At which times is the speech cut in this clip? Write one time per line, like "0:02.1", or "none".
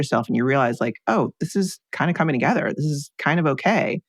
0:01.8